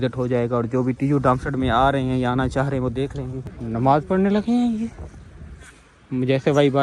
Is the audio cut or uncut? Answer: cut